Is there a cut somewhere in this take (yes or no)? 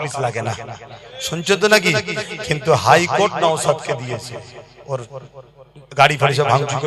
no